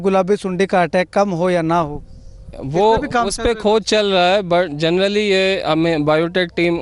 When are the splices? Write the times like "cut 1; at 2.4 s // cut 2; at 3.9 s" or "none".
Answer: none